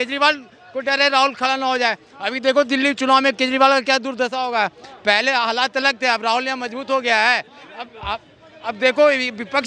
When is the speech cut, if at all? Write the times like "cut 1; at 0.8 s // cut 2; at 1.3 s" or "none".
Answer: none